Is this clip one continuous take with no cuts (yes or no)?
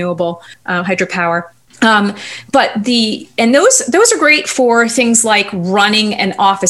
yes